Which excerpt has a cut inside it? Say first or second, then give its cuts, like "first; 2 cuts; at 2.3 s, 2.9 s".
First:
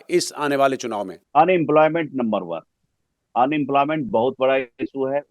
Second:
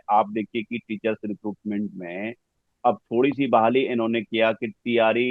first; 1 cut; at 1.2 s